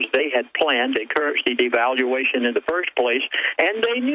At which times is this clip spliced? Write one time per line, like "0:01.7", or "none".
0:01.3

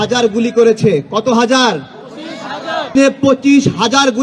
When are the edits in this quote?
0:02.9

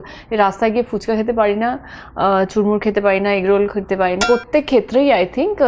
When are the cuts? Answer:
0:04.2

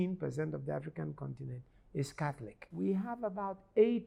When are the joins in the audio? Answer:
0:02.5

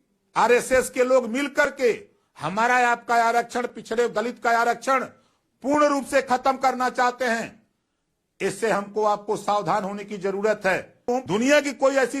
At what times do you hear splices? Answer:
0:11.1

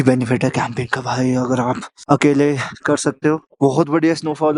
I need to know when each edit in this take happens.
none

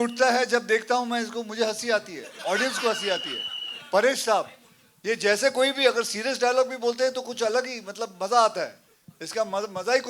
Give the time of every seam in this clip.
none

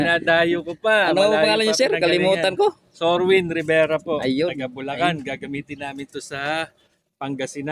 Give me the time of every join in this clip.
none

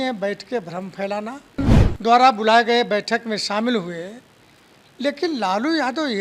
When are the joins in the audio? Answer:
0:01.8

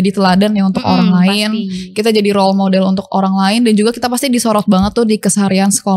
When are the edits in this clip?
none

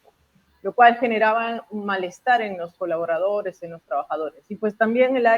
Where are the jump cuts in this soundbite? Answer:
none

